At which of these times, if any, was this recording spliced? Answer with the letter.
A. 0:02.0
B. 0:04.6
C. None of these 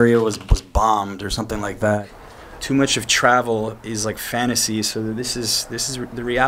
A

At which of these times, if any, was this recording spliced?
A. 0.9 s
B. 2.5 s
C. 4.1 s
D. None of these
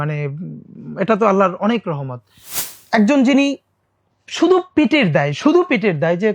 B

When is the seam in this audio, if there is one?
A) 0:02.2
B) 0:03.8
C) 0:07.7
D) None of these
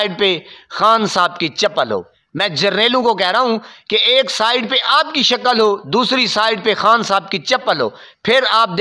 A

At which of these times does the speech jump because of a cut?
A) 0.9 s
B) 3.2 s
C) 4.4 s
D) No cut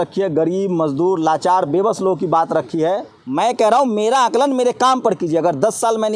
B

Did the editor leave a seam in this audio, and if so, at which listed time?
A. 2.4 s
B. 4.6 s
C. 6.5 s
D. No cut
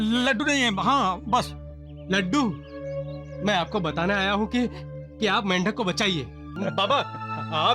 C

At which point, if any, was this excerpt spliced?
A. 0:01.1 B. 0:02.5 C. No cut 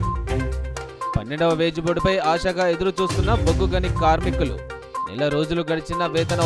A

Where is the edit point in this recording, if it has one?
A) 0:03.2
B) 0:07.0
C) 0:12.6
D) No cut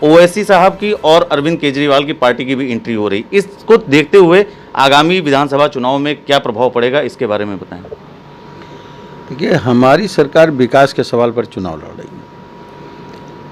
D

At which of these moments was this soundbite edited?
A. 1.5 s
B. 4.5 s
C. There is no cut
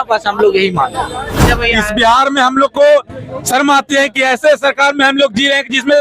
A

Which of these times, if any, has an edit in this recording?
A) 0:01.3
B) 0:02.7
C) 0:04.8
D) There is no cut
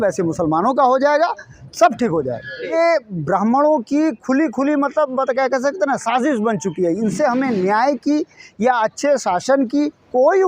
B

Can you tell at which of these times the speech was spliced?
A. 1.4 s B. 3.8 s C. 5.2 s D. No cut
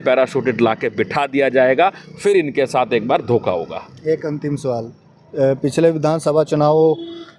D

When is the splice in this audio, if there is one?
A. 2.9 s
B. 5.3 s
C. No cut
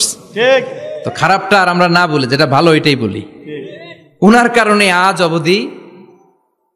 C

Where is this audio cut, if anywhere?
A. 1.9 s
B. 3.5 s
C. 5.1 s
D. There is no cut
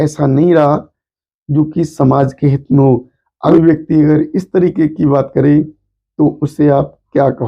B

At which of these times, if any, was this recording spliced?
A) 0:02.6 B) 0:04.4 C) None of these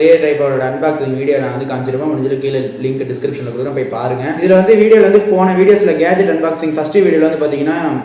B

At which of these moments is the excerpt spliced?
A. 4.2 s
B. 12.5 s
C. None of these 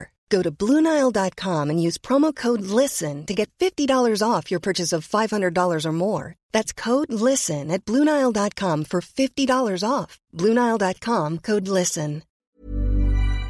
B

